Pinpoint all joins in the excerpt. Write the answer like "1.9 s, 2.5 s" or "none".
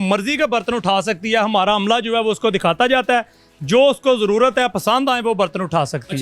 none